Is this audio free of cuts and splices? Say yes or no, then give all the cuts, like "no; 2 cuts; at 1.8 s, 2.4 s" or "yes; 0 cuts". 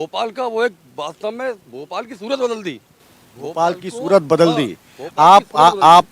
yes; 0 cuts